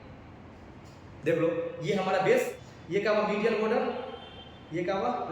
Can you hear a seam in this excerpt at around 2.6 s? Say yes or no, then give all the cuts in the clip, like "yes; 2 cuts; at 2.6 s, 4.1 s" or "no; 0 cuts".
yes; 1 cut; at 2.6 s